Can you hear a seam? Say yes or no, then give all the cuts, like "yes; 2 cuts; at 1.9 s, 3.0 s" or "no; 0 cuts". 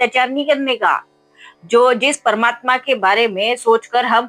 no; 0 cuts